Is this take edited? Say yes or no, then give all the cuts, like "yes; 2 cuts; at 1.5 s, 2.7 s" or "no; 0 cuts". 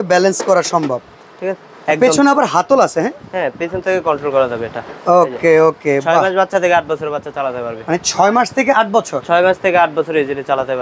no; 0 cuts